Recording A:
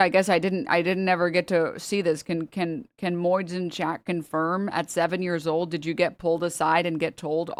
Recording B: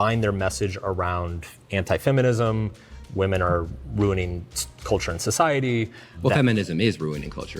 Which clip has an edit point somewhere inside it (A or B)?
B